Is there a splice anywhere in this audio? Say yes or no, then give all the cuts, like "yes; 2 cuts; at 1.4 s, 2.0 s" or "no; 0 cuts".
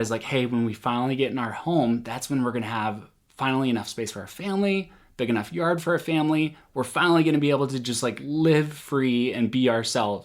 no; 0 cuts